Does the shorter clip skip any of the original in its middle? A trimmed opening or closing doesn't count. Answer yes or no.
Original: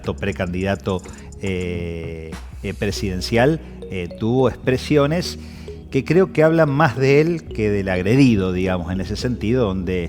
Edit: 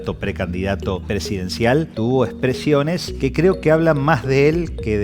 yes